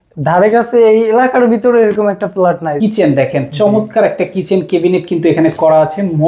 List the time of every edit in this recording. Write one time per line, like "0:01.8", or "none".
0:02.7